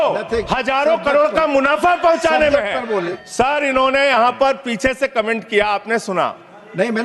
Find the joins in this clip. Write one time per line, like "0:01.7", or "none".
0:03.1